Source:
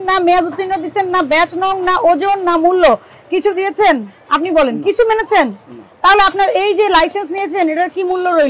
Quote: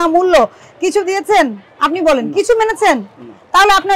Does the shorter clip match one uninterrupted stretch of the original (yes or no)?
yes